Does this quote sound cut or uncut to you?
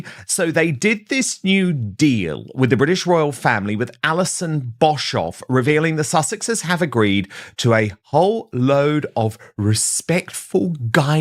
uncut